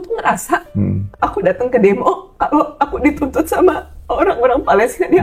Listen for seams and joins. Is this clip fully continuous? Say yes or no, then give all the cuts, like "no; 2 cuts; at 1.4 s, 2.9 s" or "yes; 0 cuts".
yes; 0 cuts